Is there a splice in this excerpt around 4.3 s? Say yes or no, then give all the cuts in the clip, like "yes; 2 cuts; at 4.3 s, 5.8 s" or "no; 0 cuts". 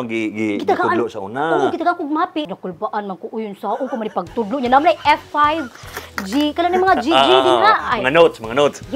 no; 1 cut; at 2.5 s